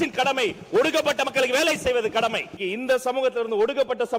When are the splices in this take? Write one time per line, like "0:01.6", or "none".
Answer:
0:02.5